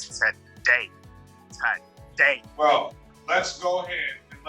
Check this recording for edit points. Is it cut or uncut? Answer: cut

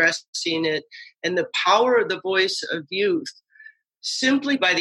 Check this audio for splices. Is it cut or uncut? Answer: uncut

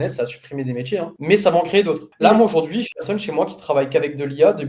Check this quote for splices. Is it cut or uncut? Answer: uncut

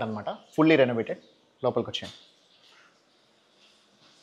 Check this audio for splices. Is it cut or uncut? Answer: uncut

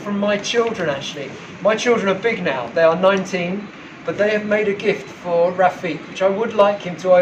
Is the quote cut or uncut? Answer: uncut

